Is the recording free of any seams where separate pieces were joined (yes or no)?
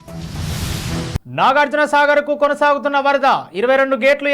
no